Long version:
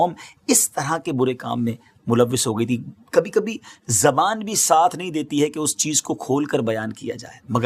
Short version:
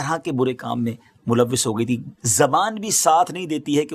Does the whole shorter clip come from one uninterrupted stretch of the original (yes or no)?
no